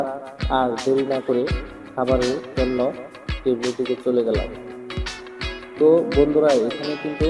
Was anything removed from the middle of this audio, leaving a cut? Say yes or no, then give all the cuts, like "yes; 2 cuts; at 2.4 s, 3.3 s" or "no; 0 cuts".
no; 0 cuts